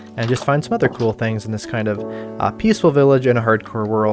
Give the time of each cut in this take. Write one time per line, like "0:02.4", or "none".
none